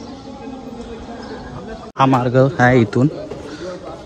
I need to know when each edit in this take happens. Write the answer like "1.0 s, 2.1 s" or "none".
1.9 s